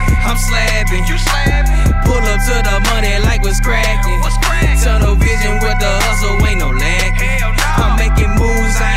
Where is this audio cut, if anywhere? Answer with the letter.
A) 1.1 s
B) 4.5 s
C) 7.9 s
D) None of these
D